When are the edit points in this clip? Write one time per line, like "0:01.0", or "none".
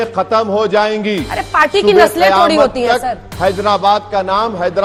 none